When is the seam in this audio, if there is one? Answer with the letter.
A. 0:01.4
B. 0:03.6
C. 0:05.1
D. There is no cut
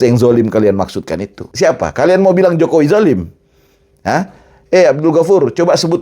A